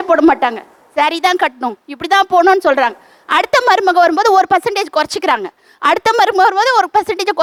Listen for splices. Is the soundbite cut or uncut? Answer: uncut